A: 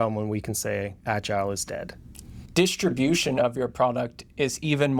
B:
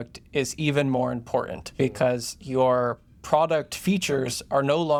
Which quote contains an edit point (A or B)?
A